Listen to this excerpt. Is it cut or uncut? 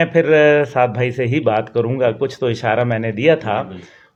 uncut